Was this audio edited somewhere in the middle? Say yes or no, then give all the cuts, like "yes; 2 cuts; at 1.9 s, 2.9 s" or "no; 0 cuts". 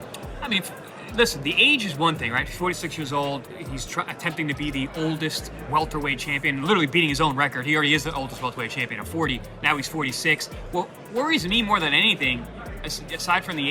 no; 0 cuts